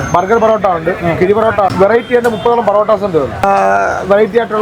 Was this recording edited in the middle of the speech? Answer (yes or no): yes